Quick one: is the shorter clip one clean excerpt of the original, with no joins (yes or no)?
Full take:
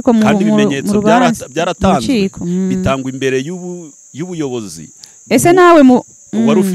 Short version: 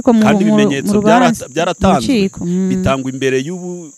yes